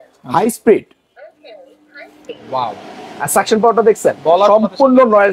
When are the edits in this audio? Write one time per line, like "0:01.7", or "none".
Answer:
none